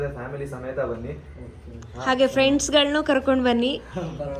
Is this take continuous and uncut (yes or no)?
yes